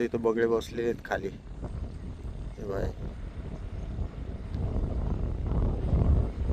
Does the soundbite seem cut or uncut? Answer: uncut